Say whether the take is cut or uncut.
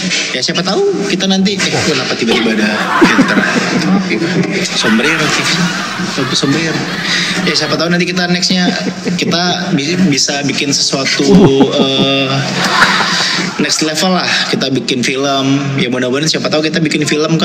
uncut